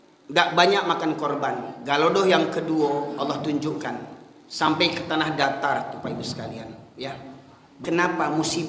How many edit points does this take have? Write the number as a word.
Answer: one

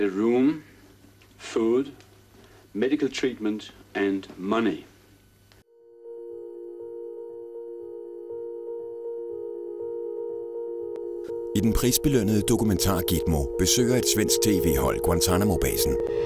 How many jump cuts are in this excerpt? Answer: one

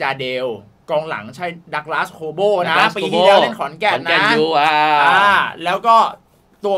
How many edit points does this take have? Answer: zero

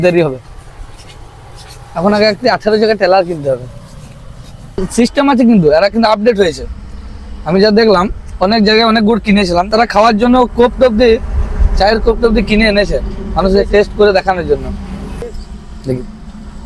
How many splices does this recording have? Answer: three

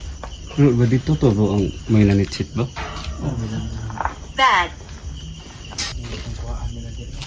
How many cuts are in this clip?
one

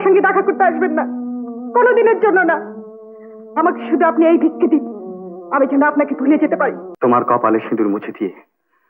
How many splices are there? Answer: one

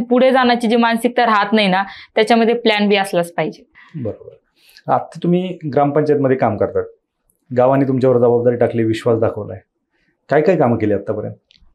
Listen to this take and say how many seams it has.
zero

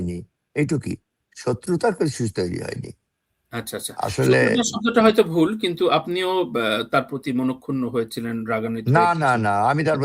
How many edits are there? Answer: zero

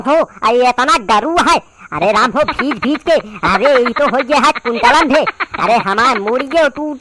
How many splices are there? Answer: one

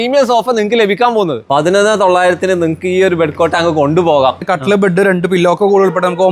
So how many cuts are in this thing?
two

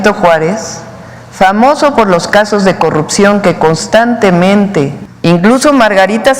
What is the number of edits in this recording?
one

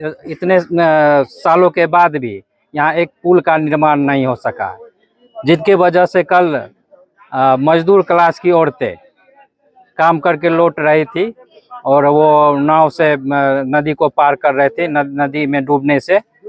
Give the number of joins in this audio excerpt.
zero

